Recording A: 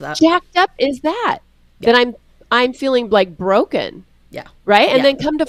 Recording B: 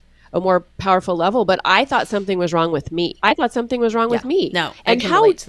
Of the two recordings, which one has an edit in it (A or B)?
B